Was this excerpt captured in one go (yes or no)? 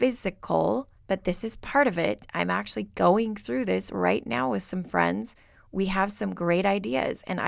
no